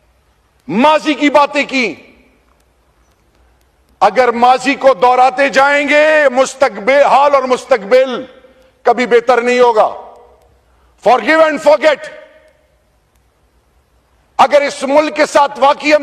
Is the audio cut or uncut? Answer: uncut